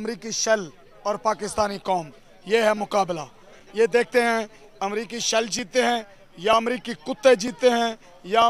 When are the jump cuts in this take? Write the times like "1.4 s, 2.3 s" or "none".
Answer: none